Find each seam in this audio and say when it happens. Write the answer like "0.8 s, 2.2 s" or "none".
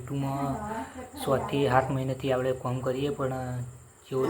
none